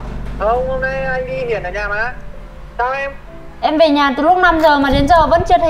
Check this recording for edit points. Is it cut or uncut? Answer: uncut